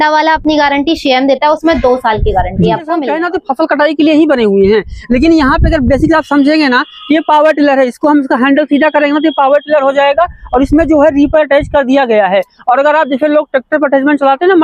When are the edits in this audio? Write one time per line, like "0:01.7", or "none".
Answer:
0:03.1